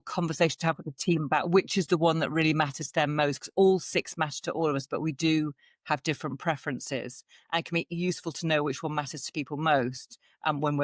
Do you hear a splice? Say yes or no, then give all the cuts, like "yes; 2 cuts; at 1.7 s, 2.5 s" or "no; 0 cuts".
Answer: no; 0 cuts